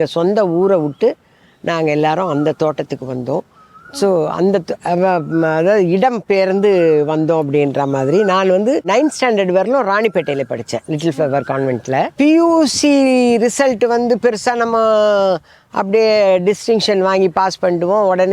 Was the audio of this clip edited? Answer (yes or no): yes